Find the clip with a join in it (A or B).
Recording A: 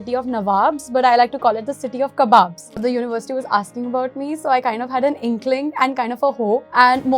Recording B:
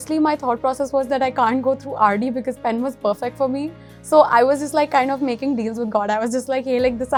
A